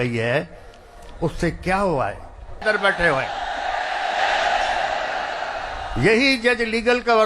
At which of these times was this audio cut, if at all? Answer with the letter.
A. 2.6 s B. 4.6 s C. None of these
A